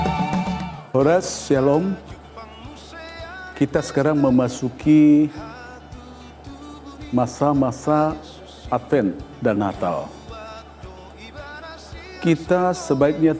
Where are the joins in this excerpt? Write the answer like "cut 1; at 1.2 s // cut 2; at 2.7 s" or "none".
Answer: none